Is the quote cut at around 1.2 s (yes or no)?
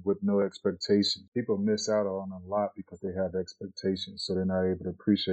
yes